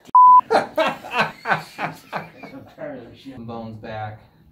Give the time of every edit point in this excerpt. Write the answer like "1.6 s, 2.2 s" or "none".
0.9 s, 3.4 s